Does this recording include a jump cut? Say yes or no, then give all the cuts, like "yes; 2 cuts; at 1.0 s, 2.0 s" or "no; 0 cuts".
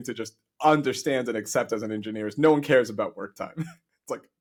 no; 0 cuts